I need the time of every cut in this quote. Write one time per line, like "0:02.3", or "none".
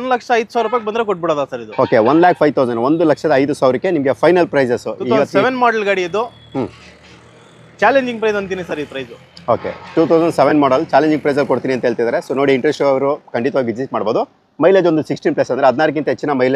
none